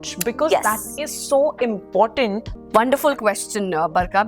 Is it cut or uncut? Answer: cut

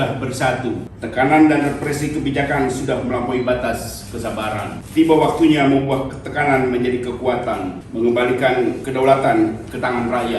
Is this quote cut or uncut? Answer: cut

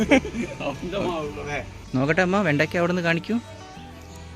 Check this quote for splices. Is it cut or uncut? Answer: cut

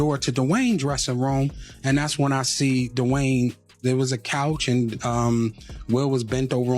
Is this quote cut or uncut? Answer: cut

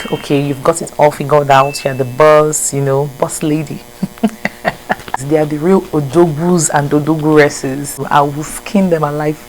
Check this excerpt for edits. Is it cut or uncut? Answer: cut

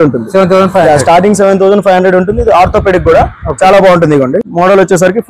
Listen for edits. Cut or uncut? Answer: cut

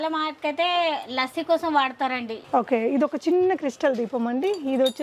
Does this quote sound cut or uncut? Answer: cut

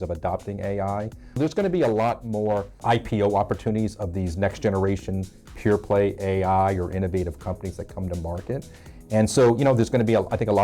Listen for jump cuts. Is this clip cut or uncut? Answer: cut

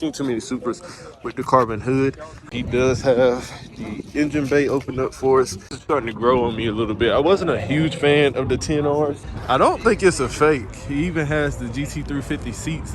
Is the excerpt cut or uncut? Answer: cut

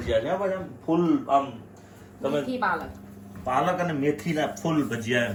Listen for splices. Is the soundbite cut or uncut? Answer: uncut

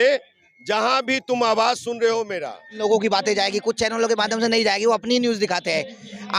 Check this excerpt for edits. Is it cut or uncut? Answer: cut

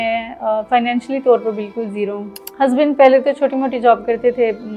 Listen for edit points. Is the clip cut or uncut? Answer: cut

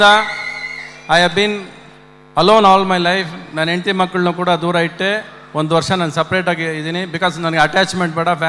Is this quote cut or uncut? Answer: uncut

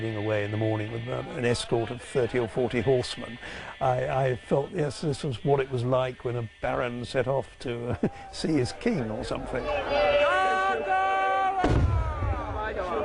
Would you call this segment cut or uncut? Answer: uncut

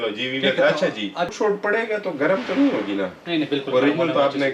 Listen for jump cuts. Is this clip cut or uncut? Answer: cut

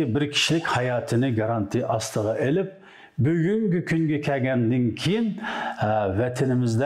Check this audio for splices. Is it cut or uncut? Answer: uncut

